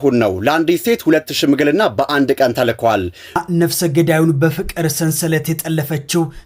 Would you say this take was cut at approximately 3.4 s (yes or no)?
yes